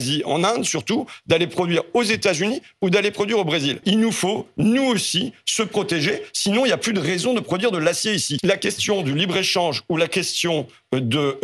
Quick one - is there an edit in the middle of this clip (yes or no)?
yes